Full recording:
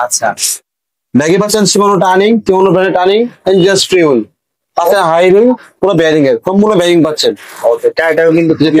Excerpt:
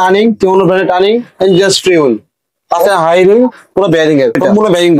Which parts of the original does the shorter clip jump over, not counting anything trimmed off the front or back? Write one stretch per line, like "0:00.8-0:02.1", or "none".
none